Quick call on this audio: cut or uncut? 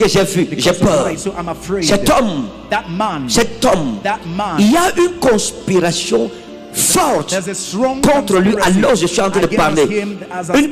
uncut